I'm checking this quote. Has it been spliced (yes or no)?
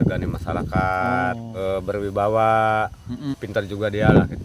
yes